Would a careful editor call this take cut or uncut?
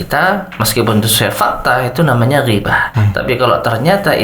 cut